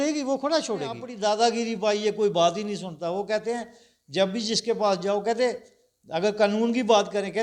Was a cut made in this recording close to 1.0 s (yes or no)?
yes